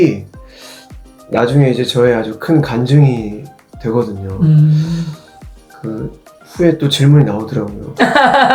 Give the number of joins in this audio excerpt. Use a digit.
0